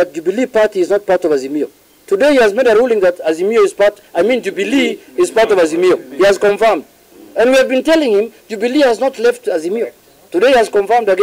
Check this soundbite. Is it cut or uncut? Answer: uncut